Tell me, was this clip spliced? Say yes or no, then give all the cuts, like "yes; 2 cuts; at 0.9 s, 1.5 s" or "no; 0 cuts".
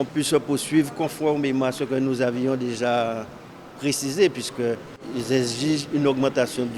yes; 1 cut; at 5.0 s